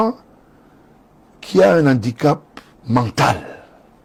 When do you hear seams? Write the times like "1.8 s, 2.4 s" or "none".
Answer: none